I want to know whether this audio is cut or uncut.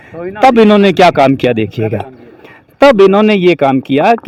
uncut